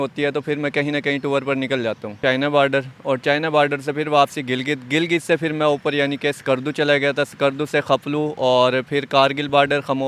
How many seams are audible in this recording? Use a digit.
1